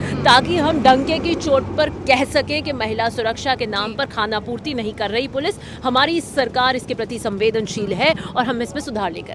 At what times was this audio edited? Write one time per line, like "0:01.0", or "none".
none